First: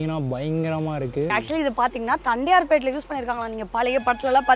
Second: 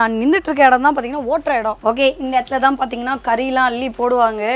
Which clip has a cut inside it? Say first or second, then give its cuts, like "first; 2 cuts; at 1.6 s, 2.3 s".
first; 1 cut; at 1.3 s